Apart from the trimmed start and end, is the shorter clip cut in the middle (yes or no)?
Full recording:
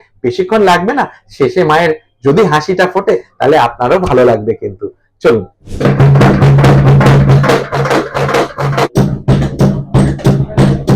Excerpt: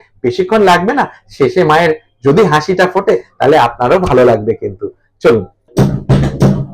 yes